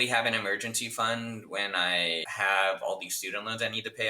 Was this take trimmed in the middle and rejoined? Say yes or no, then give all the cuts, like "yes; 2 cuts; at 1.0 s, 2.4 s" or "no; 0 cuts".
yes; 1 cut; at 2.3 s